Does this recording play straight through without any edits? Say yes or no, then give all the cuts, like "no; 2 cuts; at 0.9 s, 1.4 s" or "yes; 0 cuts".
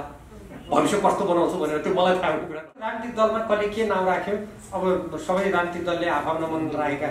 no; 1 cut; at 3.0 s